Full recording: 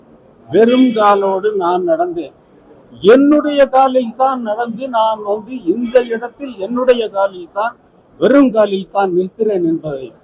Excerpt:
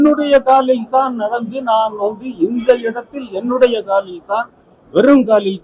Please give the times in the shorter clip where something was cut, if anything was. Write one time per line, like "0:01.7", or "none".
none